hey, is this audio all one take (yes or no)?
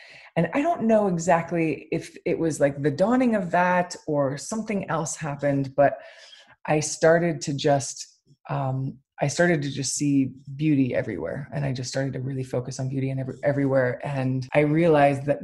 no